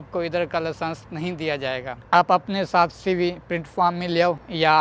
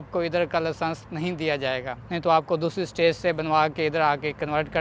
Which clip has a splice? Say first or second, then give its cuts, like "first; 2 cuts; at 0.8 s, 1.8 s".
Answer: first; 1 cut; at 2.0 s